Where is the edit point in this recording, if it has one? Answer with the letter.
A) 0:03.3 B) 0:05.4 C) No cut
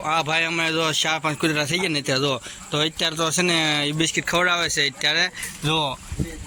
C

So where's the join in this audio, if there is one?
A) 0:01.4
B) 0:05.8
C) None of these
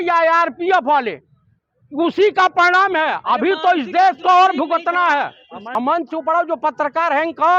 B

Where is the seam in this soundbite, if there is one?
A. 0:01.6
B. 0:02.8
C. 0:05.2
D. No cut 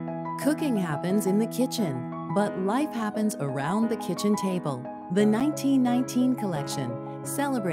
D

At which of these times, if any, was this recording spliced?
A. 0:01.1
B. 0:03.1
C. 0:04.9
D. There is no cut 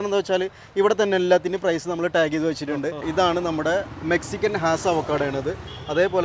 B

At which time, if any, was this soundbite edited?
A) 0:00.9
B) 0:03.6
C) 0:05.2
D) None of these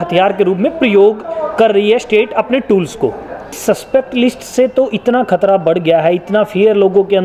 B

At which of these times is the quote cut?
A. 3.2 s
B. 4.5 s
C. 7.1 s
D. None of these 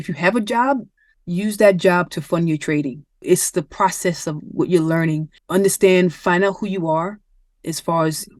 A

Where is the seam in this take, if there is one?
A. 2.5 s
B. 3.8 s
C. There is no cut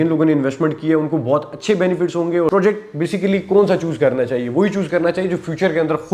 A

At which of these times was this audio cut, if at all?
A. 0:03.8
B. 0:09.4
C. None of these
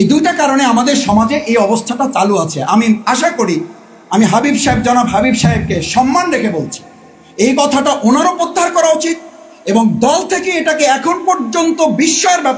C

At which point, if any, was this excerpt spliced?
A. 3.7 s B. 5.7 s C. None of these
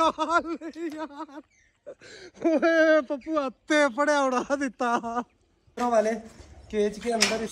B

